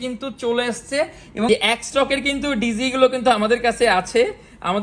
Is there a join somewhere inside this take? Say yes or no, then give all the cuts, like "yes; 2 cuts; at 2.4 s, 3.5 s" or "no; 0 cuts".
yes; 1 cut; at 1.5 s